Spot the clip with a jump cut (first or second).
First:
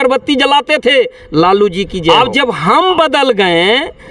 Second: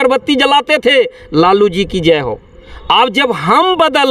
first